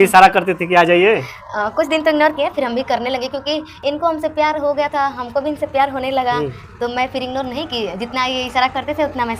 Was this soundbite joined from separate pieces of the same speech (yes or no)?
no